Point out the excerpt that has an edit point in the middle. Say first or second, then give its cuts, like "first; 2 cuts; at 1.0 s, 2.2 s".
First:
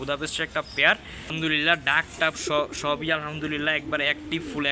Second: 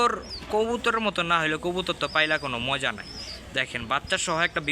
first; 1 cut; at 1.2 s